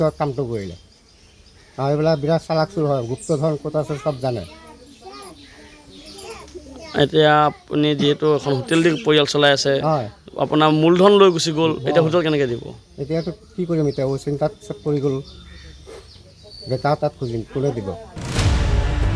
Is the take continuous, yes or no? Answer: no